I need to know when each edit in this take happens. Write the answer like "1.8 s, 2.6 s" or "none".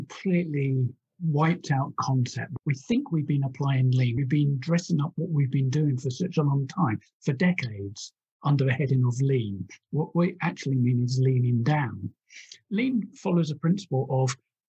2.4 s, 4.2 s, 12.5 s